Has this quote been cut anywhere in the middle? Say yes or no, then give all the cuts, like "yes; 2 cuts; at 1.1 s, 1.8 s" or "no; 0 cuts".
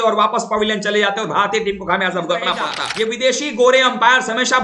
yes; 1 cut; at 2.8 s